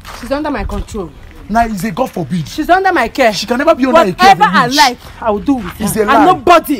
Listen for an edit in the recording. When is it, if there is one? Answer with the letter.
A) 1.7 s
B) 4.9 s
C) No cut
C